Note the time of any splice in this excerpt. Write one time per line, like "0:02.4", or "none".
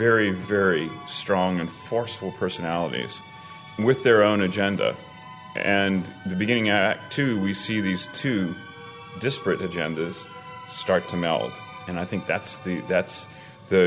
none